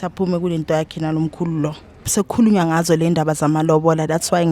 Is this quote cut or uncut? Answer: cut